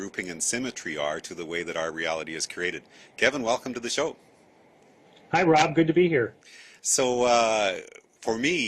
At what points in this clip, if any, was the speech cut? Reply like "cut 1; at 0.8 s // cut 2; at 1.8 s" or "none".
cut 1; at 3.7 s